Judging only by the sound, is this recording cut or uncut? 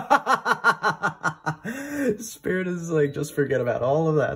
uncut